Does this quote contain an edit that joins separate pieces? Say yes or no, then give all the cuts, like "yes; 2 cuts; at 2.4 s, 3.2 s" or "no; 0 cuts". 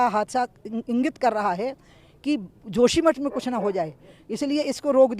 no; 0 cuts